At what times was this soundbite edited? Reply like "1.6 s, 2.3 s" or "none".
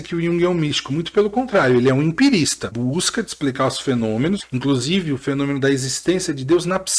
2.7 s, 4.4 s